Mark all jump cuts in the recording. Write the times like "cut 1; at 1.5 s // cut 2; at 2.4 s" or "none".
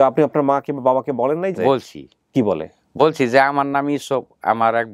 cut 1; at 1.5 s